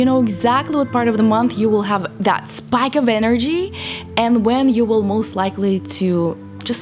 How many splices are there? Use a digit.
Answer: 0